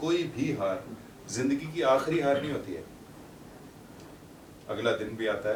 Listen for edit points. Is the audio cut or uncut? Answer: uncut